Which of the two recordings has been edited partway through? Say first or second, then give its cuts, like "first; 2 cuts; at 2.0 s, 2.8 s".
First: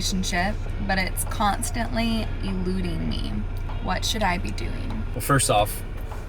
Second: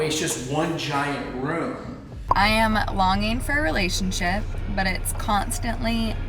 second; 1 cut; at 2.1 s